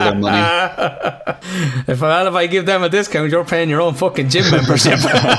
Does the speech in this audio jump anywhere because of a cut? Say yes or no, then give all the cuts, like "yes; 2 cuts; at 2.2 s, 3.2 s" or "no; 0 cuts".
yes; 1 cut; at 1.4 s